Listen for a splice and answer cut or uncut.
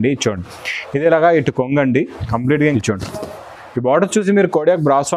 cut